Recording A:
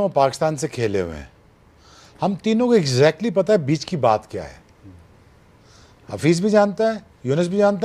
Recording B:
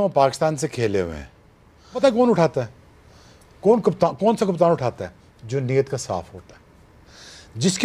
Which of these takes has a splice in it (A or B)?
B